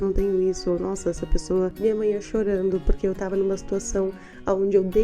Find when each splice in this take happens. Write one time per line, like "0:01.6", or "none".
0:01.7